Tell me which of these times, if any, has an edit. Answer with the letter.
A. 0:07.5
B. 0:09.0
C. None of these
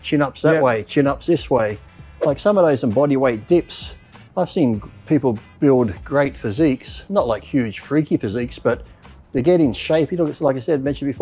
C